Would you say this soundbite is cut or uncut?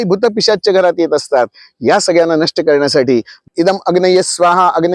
cut